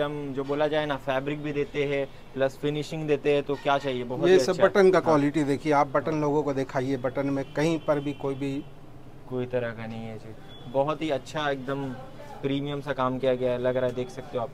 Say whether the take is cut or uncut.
uncut